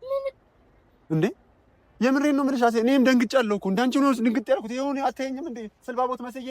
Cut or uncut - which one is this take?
uncut